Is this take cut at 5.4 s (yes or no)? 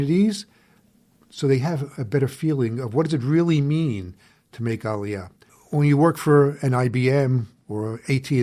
yes